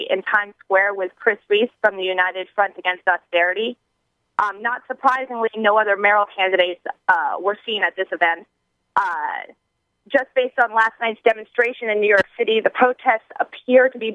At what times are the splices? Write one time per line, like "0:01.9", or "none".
0:02.3